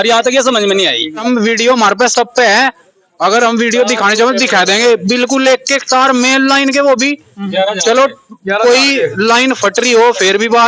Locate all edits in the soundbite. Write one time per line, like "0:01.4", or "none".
0:01.2

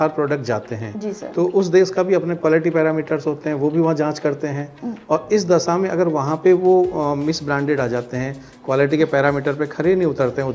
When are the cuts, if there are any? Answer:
none

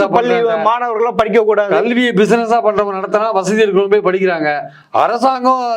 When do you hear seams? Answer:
none

